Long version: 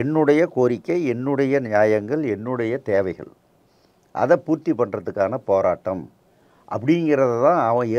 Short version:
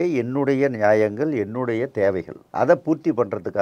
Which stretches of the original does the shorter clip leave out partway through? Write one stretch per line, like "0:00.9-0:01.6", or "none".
0:03.3-0:04.0